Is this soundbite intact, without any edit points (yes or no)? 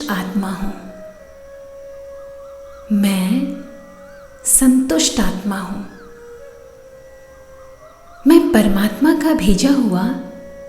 no